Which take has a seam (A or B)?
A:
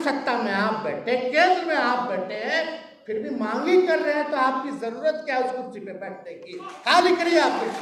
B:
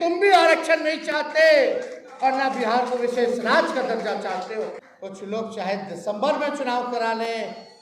B